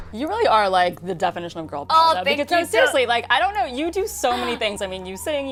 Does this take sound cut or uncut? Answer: uncut